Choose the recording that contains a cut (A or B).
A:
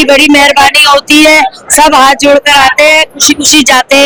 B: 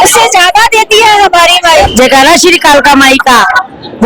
B